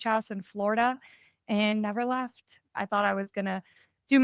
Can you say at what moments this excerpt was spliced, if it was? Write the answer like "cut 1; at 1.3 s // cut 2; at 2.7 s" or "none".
cut 1; at 2.7 s